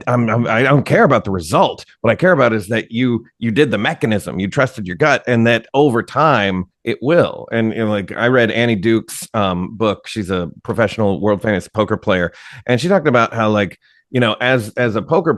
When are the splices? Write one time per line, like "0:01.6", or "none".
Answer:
0:10.5